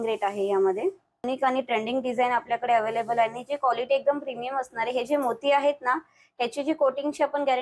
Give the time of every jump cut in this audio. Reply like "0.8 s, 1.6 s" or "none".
1.3 s